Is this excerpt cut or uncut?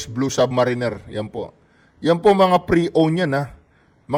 uncut